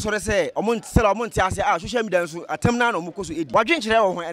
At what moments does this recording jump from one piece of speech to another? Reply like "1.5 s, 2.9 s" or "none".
3.4 s